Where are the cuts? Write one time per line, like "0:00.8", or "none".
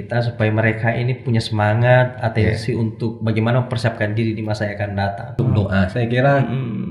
0:05.4